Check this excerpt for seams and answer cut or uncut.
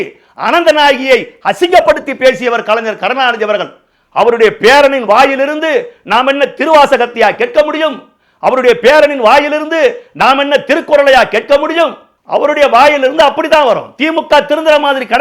uncut